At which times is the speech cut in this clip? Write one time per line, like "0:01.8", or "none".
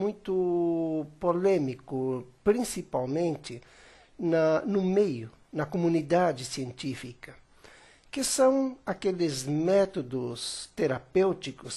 0:07.3